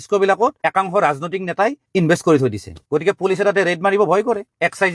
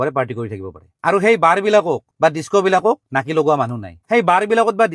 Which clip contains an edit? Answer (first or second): second